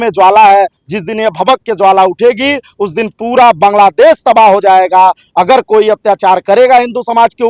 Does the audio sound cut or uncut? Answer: uncut